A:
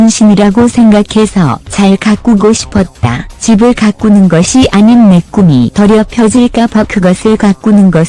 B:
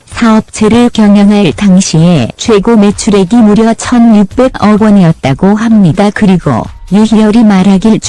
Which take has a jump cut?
A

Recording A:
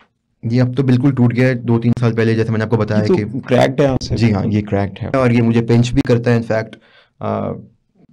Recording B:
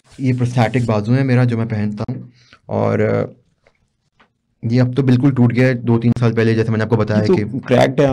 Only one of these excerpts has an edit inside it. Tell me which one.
A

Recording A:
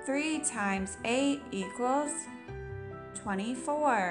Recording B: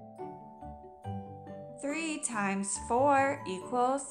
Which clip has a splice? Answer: B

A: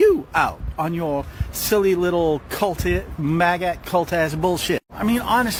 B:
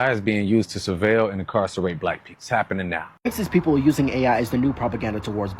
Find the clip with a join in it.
B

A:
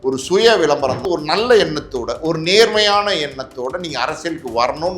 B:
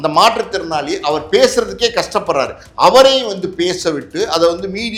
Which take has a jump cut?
A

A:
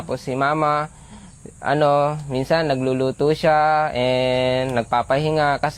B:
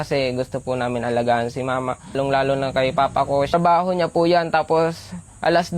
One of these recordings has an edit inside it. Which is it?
B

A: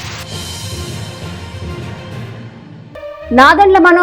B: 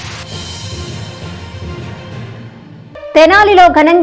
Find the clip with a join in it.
B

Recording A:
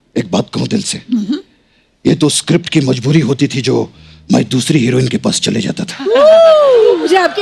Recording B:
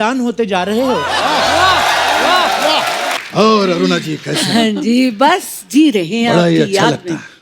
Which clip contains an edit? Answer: B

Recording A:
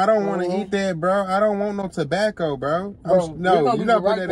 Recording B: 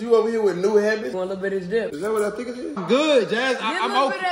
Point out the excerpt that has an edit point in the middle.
B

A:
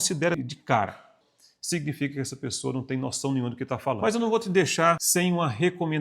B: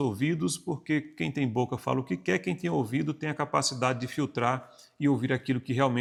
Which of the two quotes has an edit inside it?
A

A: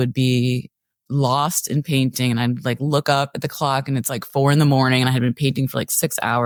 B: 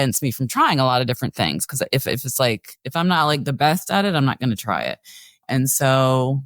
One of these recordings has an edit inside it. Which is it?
B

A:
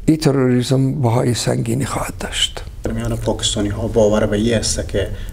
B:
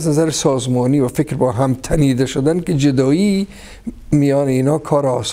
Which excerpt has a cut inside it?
A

